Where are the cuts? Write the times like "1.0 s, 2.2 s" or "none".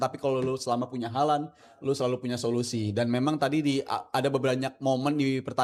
none